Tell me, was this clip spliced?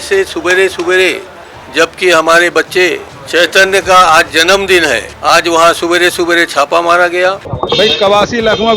yes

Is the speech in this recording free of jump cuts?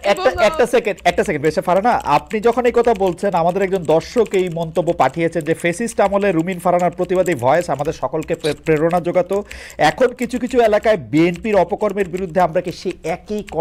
yes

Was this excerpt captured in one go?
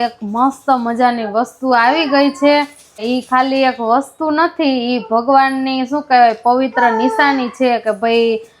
no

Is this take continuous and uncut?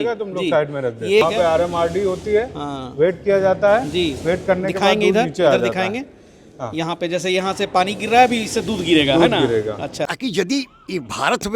no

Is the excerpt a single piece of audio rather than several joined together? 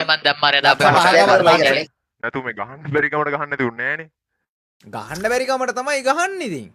no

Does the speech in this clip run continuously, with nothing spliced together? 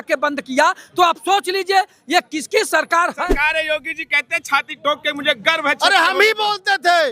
no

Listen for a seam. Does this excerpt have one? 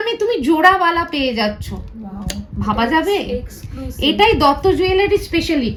no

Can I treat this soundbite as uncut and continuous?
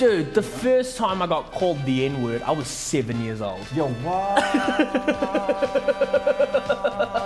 yes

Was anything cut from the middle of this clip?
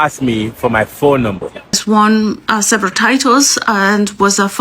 yes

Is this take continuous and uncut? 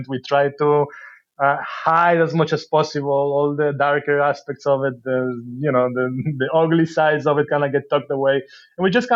yes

